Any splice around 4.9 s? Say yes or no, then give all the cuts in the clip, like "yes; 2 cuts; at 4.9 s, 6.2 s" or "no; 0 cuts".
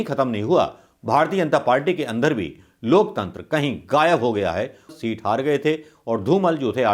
yes; 1 cut; at 4.9 s